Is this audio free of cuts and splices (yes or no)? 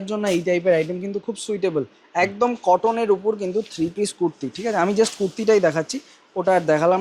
yes